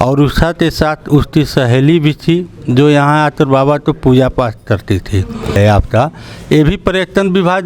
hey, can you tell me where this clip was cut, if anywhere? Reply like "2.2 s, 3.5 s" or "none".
5.6 s